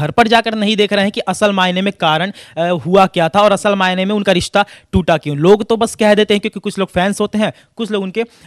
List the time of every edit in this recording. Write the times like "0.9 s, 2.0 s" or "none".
none

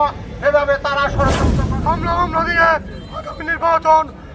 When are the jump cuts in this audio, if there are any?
1.6 s

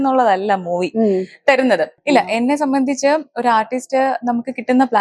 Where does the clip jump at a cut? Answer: 1.9 s

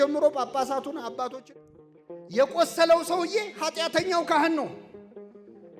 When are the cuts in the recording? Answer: 1.2 s

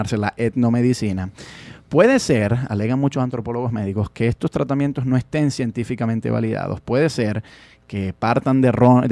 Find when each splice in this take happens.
6.5 s

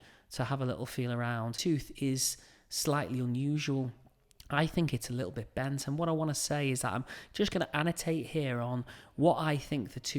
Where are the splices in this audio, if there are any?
1.5 s

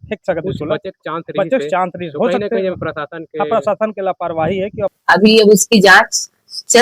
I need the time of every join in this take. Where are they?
5.0 s

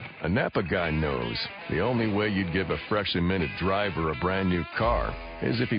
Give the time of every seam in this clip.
1.9 s

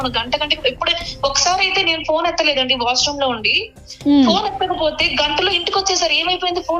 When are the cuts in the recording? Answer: none

